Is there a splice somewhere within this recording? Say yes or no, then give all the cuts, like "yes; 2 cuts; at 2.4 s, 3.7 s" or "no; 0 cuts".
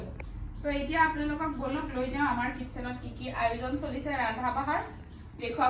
no; 0 cuts